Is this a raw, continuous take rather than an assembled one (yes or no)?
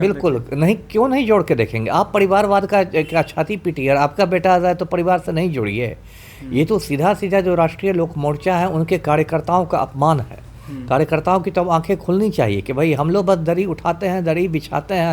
yes